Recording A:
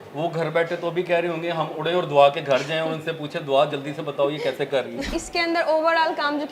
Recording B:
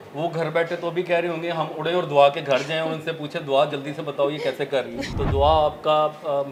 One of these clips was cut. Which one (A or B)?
A